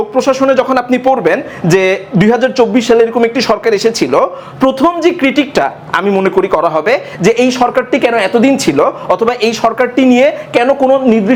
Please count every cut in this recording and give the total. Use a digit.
0